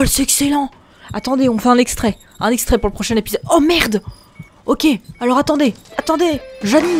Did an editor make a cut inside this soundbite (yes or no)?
yes